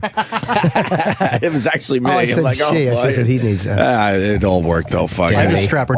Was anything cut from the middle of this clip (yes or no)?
no